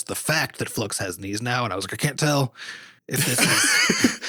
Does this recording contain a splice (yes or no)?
no